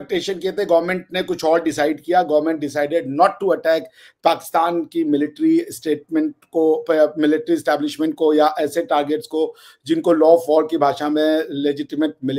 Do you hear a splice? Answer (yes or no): no